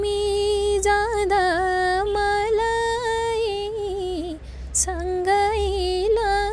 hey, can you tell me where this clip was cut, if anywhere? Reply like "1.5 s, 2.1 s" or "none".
none